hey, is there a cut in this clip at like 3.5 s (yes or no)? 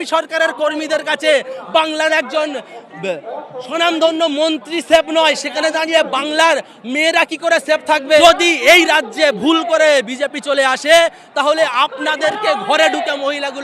no